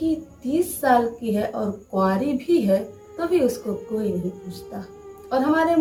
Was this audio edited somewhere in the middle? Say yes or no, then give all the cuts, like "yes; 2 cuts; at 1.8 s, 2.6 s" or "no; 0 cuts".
no; 0 cuts